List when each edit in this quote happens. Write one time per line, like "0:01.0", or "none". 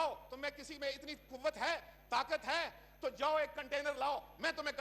none